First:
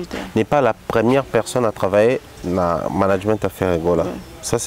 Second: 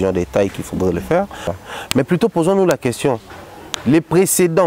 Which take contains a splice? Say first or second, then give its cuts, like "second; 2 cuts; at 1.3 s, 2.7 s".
second; 1 cut; at 1.5 s